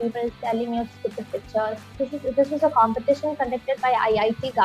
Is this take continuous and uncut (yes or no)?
no